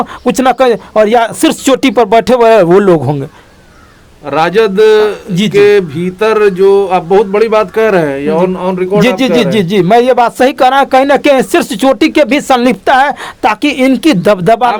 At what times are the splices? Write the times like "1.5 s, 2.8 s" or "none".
none